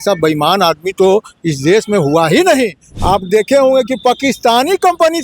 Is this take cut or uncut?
cut